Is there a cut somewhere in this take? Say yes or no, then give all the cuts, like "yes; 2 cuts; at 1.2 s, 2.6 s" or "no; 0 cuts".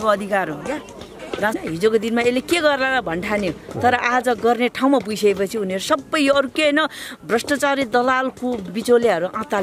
yes; 1 cut; at 1.6 s